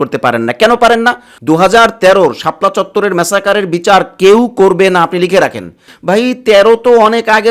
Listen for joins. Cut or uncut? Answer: cut